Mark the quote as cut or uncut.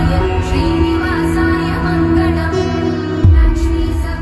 uncut